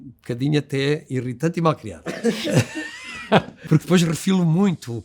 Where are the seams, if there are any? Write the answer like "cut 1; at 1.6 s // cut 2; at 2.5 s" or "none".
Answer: cut 1; at 3.6 s